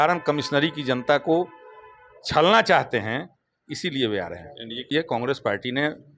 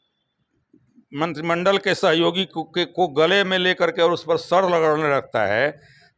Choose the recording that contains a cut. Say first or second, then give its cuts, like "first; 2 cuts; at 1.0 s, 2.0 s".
first; 1 cut; at 4.8 s